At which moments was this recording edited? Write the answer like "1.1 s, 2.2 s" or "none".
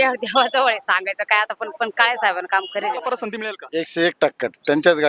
3.1 s